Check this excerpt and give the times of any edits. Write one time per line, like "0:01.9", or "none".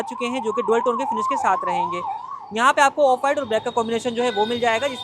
none